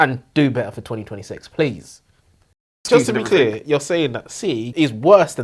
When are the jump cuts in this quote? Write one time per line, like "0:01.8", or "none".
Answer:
0:02.7